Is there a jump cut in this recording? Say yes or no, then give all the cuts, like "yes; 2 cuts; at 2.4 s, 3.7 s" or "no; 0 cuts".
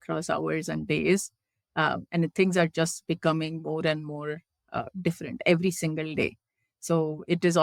no; 0 cuts